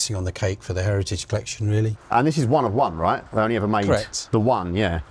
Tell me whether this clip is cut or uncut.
cut